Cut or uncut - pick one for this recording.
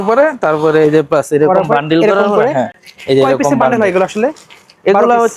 uncut